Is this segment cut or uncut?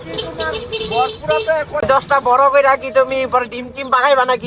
cut